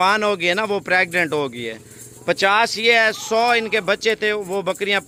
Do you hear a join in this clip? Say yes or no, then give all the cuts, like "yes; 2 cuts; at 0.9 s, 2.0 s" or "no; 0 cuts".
no; 0 cuts